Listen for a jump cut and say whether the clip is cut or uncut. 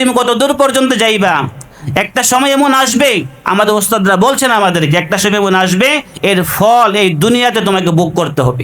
uncut